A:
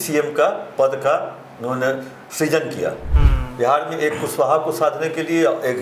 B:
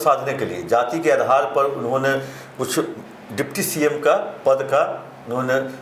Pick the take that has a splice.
A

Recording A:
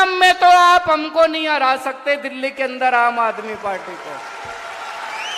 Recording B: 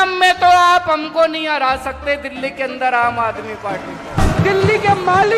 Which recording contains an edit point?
B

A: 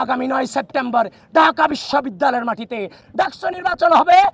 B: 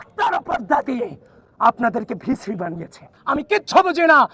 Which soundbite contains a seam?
B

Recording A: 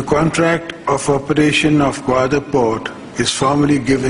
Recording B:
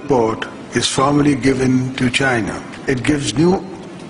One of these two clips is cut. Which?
B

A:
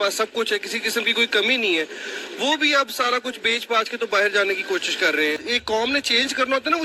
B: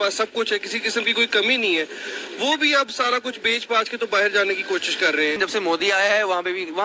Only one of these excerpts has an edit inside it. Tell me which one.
B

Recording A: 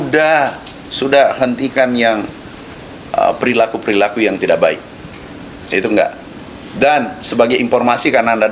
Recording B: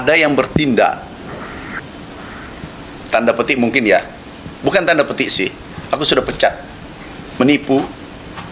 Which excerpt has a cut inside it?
B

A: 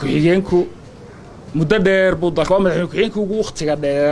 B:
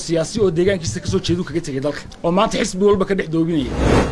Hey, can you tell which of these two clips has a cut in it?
B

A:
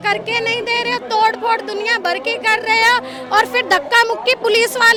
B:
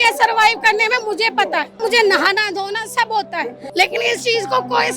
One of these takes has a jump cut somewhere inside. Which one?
B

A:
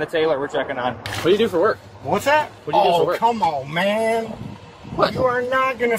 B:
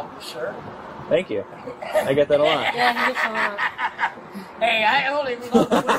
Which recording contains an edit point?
A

